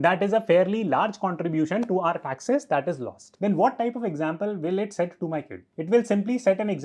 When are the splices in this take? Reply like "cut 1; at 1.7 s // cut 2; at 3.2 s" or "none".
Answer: cut 1; at 3.2 s